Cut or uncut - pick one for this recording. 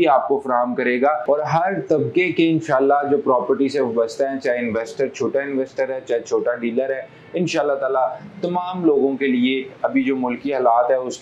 uncut